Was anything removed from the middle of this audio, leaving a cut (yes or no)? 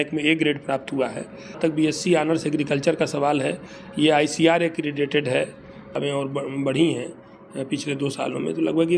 yes